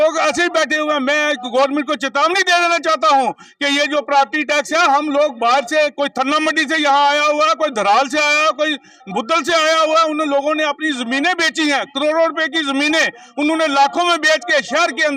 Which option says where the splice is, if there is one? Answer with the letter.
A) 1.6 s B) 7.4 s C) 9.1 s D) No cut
D